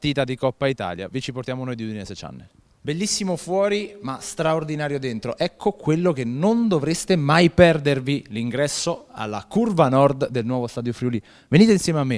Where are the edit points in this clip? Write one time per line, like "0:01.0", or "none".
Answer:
0:05.2